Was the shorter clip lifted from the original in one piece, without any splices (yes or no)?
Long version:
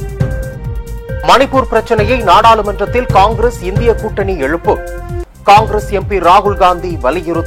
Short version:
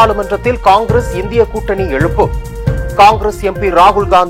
yes